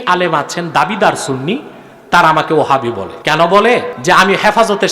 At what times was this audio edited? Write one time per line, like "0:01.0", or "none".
0:03.1
0:03.9